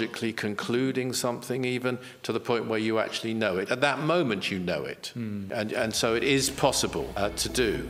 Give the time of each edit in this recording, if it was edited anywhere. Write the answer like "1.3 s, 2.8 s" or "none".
5.4 s, 7.1 s